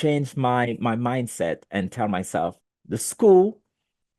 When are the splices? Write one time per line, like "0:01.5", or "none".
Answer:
0:02.7